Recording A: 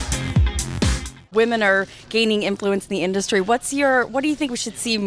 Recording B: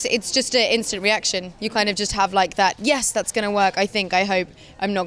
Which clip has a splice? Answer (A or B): B